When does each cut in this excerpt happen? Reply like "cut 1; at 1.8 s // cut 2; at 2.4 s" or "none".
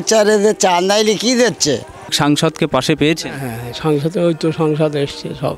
cut 1; at 2.1 s